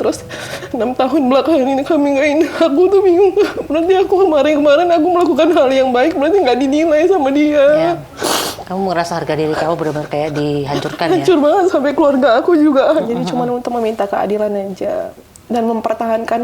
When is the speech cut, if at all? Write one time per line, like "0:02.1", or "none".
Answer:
0:13.1